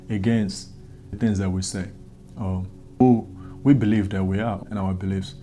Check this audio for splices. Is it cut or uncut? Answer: cut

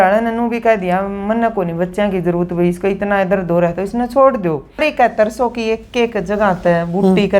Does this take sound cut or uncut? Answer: cut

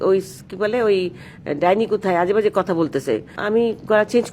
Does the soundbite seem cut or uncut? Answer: cut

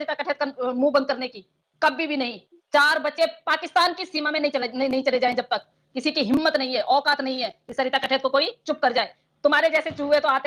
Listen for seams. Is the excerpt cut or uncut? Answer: uncut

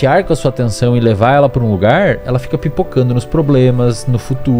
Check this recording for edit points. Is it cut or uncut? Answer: uncut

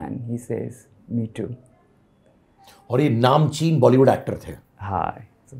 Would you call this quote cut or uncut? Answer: uncut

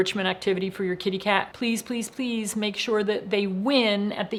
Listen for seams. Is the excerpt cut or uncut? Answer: uncut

